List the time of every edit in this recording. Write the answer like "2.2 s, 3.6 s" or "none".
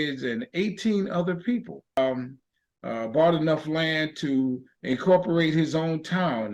2.0 s